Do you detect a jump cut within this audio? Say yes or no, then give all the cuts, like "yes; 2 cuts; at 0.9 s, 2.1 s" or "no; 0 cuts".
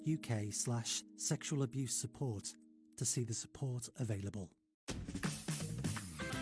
yes; 1 cut; at 4.7 s